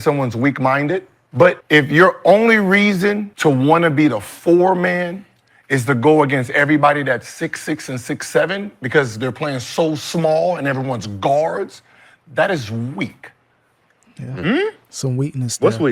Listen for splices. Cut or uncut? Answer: cut